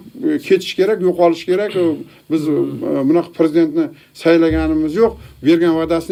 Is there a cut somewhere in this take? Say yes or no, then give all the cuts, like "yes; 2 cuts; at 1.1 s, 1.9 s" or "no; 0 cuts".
no; 0 cuts